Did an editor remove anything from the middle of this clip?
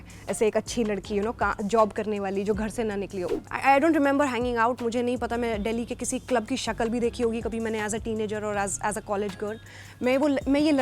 yes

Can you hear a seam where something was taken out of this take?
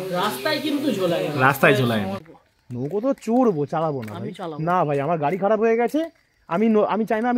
yes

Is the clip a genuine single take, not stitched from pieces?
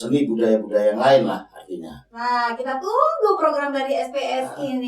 no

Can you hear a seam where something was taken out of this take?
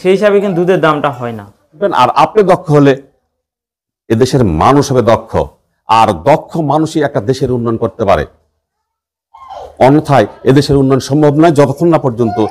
yes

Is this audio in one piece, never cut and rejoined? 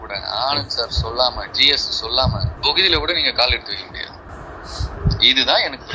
yes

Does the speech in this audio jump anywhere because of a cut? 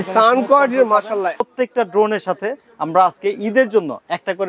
yes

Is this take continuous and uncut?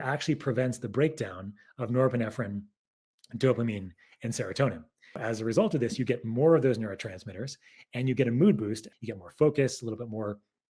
no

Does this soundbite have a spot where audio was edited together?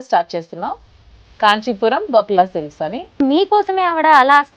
yes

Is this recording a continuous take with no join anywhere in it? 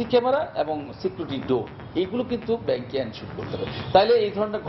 yes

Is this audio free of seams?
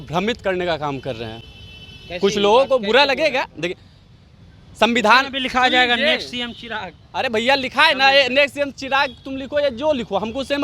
yes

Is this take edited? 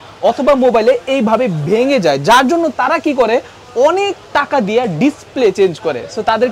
no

